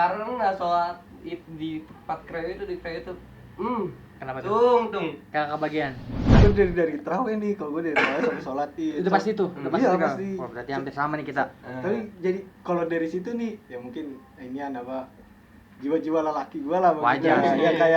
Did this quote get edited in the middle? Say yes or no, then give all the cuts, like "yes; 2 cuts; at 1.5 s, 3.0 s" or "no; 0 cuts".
yes; 1 cut; at 6.1 s